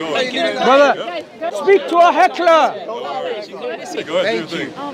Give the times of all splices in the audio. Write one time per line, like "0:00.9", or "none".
0:01.5
0:03.9